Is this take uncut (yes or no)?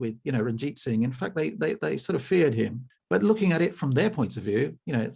no